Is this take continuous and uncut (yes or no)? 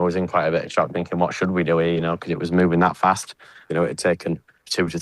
no